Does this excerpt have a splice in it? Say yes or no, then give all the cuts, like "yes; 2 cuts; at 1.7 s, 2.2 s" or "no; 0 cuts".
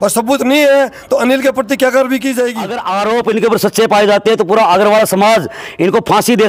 yes; 1 cut; at 2.8 s